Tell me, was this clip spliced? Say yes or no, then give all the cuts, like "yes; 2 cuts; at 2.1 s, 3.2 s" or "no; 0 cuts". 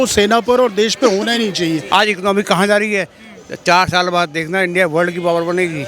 yes; 1 cut; at 1.8 s